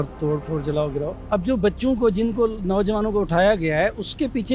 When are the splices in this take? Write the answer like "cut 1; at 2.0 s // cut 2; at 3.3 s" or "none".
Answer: cut 1; at 1.2 s

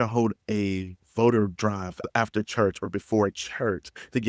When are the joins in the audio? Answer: cut 1; at 2.0 s

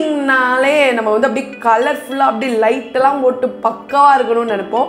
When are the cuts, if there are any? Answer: none

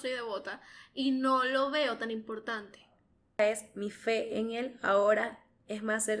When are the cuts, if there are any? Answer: cut 1; at 3.4 s

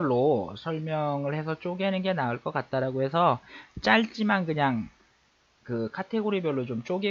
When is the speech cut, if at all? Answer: none

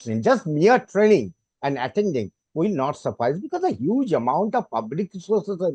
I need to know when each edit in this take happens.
none

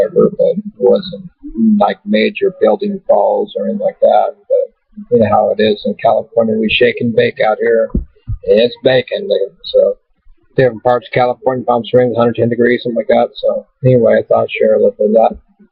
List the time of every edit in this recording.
cut 1; at 14.2 s

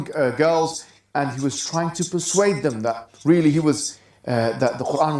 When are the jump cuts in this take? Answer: cut 1; at 3.1 s

